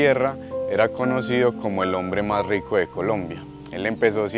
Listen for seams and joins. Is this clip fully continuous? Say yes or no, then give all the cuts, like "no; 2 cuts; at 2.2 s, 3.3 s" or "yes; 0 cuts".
yes; 0 cuts